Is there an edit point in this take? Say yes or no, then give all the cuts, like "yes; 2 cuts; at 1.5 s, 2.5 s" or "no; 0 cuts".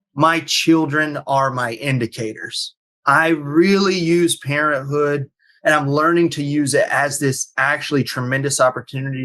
no; 0 cuts